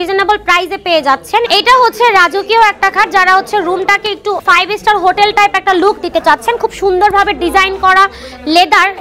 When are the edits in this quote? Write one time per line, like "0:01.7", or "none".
0:01.5
0:04.4